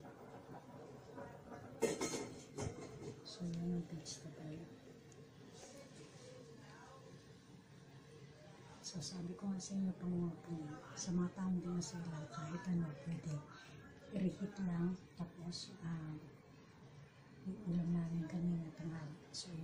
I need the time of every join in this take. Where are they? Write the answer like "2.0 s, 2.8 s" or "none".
18.2 s